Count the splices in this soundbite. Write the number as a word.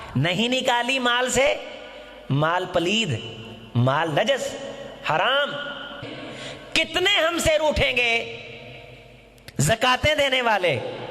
one